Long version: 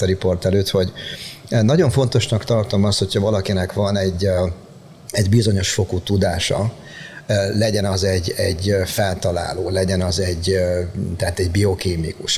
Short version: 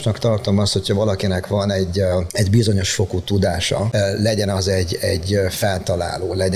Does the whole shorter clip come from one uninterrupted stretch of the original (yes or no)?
no